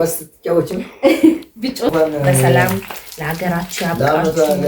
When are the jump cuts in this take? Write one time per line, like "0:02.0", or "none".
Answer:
0:01.9